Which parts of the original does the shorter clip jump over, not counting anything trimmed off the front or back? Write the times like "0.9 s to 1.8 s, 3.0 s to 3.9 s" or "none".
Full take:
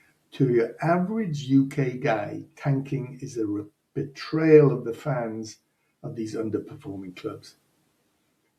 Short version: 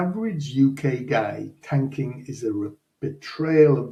none